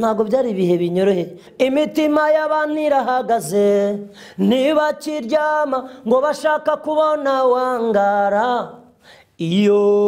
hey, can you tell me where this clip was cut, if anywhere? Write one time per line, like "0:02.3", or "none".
0:01.4